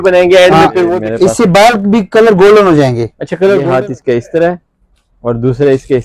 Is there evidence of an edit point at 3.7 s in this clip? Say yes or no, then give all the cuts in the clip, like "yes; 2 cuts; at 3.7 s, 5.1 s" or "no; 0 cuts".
yes; 2 cuts; at 1.0 s, 3.7 s